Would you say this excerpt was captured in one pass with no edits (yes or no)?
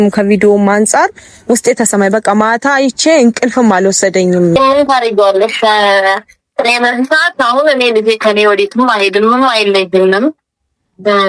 no